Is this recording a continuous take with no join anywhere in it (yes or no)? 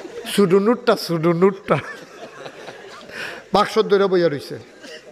yes